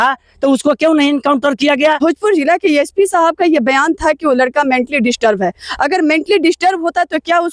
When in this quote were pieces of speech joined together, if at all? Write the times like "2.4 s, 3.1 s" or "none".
2.0 s